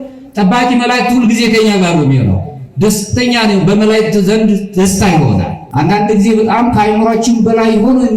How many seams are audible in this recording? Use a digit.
1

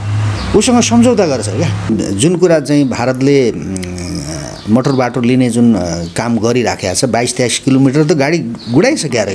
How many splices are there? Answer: 1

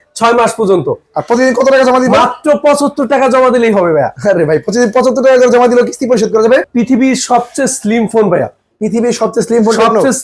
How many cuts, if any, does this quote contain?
1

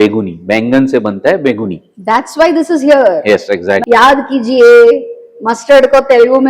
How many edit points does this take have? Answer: 1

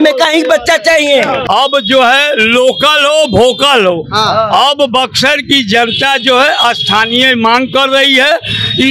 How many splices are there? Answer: 1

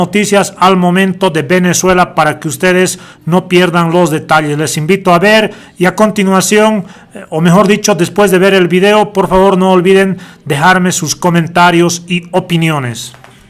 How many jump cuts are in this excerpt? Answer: 1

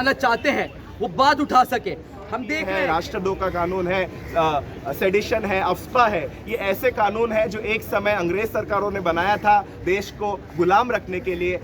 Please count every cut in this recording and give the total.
1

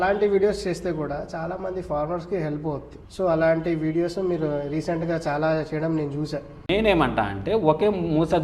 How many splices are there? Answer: 2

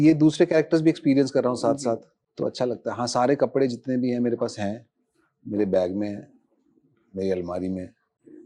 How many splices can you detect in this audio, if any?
0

